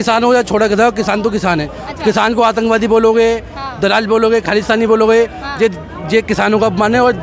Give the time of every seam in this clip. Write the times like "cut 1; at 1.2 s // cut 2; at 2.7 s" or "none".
none